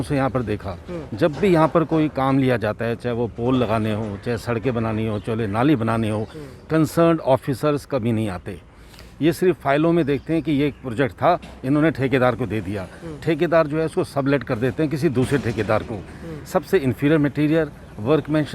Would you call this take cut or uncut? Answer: uncut